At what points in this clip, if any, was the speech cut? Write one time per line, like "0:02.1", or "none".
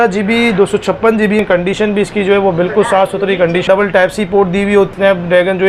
0:01.4
0:03.7
0:04.9